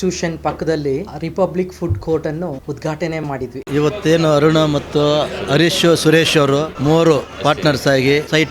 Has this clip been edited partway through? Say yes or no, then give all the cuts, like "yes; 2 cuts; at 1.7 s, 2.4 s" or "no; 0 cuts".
yes; 3 cuts; at 1.1 s, 2.6 s, 3.6 s